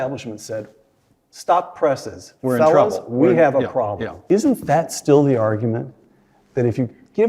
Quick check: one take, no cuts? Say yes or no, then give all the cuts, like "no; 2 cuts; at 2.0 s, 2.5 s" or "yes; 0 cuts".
no; 1 cut; at 4.1 s